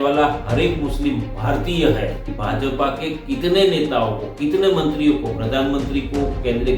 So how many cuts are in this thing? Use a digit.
1